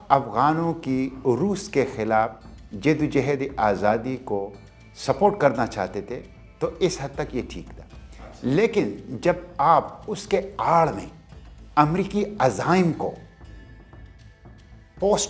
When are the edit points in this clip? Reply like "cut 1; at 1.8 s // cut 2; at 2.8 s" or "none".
none